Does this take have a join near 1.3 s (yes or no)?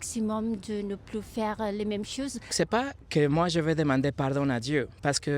no